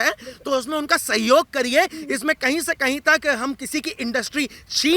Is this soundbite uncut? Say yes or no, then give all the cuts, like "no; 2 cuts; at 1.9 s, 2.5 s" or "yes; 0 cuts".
yes; 0 cuts